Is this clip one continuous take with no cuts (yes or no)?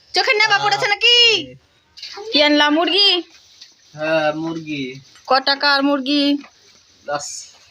no